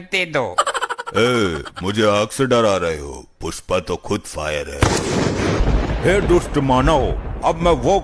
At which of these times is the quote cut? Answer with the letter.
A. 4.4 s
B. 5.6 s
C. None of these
B